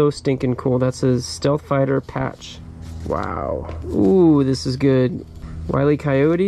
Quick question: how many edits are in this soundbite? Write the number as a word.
zero